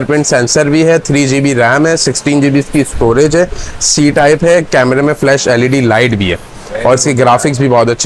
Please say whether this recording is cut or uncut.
uncut